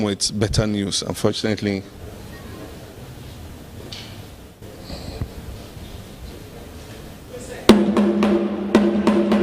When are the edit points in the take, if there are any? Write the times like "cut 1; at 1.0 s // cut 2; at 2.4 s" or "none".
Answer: cut 1; at 7.3 s

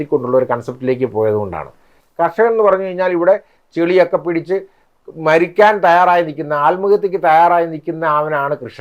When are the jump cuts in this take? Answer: cut 1; at 1.9 s

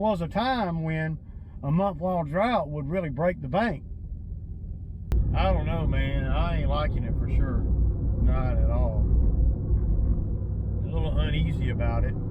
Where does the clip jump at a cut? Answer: cut 1; at 5.1 s

